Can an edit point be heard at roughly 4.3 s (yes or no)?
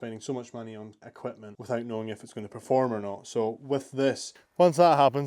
yes